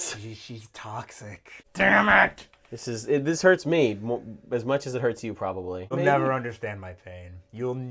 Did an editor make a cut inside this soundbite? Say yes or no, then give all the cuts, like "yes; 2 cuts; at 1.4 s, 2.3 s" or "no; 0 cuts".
yes; 2 cuts; at 1.6 s, 5.9 s